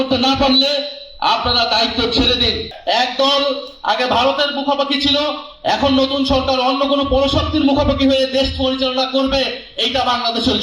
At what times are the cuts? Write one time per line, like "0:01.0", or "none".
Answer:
0:02.7